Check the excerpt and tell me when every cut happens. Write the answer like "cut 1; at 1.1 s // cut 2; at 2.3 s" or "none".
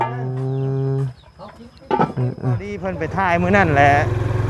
cut 1; at 3.0 s